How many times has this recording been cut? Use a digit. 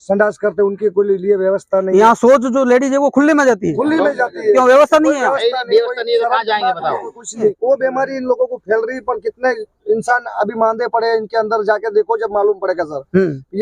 1